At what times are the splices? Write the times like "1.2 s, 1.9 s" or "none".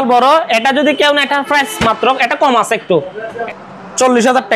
3.4 s